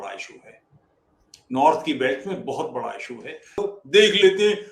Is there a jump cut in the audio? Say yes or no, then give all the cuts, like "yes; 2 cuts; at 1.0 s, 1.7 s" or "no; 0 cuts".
yes; 1 cut; at 3.6 s